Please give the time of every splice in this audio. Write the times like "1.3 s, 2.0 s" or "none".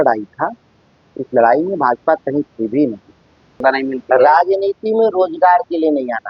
3.6 s